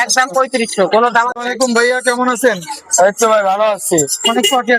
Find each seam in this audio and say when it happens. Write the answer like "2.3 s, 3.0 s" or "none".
1.3 s